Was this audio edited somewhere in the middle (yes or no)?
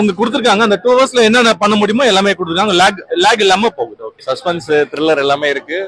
yes